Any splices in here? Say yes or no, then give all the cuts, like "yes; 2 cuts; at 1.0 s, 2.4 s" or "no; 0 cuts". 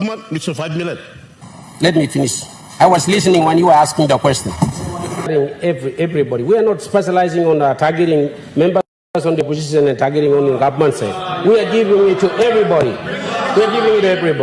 yes; 2 cuts; at 1.3 s, 5.3 s